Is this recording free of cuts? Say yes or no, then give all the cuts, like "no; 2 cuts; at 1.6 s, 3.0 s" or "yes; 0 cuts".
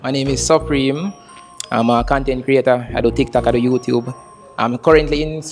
yes; 0 cuts